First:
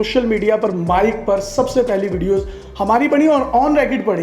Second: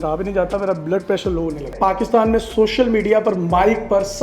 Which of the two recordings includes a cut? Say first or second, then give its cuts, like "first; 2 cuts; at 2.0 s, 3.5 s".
second; 1 cut; at 1.7 s